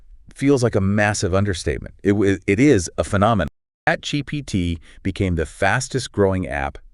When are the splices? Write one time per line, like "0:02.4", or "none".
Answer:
0:03.6